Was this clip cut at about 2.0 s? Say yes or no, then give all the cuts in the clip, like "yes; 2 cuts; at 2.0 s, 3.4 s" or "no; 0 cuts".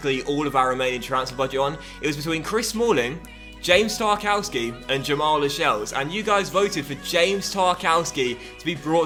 no; 0 cuts